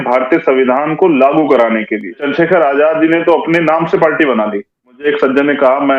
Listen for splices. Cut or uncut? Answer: cut